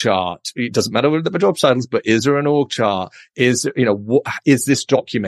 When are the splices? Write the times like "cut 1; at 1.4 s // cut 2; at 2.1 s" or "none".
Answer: none